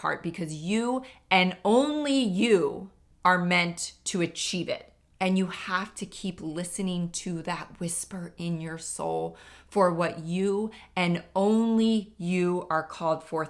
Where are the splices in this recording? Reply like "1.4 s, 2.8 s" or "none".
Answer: 5.0 s